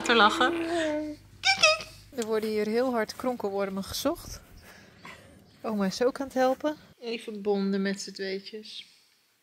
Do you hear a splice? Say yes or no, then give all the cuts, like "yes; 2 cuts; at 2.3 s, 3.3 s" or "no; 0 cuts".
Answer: yes; 2 cuts; at 2.0 s, 6.9 s